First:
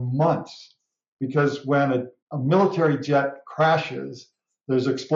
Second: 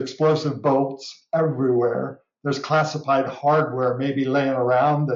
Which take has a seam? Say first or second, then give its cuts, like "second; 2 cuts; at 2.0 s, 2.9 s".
first; 1 cut; at 2.2 s